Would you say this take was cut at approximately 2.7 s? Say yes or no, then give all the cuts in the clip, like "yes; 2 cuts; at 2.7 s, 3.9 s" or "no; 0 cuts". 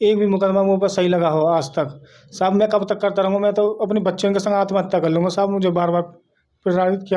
no; 0 cuts